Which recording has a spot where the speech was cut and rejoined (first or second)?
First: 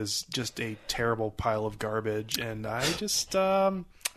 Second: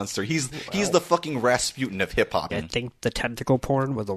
second